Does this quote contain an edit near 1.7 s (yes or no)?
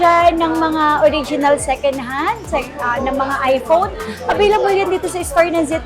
no